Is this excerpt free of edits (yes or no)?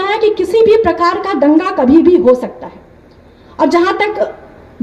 yes